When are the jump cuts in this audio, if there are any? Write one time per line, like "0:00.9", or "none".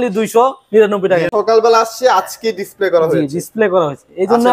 0:01.3